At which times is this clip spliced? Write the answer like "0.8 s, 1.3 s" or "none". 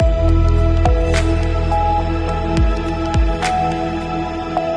none